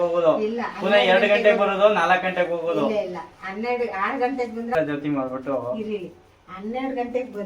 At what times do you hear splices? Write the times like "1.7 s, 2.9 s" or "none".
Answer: 4.8 s